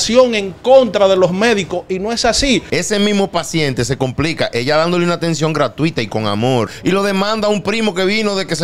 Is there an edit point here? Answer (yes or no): yes